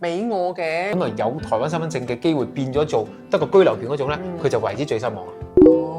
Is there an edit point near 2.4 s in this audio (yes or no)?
no